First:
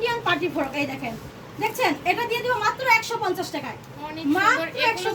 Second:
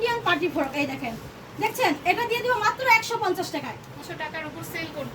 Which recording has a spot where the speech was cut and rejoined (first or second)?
second